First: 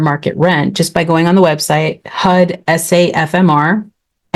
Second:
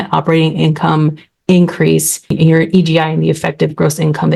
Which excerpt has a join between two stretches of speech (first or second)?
second